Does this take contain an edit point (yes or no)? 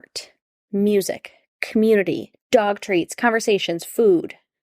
yes